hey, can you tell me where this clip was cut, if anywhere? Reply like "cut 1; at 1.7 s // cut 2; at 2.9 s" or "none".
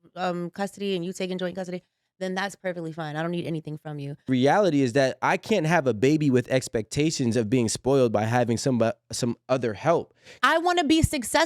cut 1; at 4.3 s // cut 2; at 10.4 s